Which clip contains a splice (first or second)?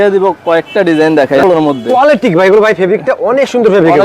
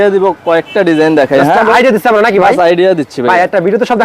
first